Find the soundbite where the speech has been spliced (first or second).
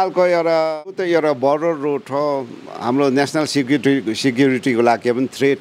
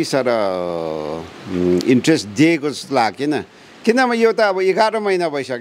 first